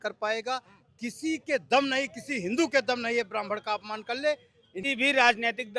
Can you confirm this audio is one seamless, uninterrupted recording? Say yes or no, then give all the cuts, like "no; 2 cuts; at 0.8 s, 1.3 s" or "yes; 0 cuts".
no; 1 cut; at 4.8 s